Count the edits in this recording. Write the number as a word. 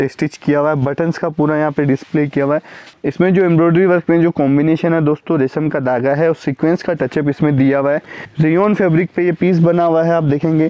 two